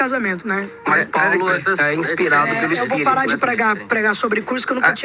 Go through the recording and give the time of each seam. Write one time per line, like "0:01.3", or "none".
none